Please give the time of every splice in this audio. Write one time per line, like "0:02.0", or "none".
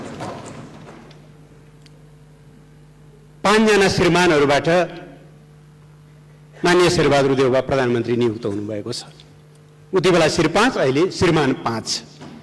none